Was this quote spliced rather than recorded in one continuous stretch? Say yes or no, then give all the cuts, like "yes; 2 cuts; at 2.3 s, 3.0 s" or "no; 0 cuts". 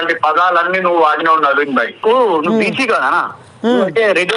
yes; 1 cut; at 1.9 s